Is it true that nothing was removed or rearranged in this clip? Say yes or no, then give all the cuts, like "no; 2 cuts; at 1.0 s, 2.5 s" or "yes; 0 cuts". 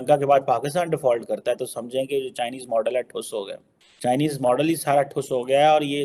yes; 0 cuts